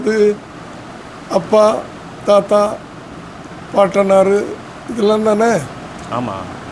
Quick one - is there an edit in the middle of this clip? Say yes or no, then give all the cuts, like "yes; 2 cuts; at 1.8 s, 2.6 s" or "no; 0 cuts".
no; 0 cuts